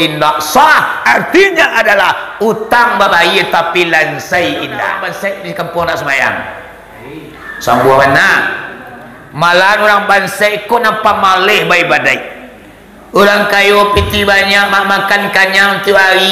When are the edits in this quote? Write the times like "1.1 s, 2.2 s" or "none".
5.0 s